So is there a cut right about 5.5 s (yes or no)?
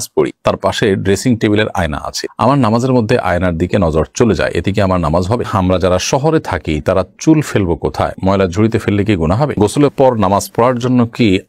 yes